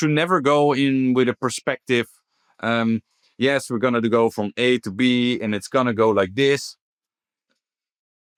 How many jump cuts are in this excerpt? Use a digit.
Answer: 0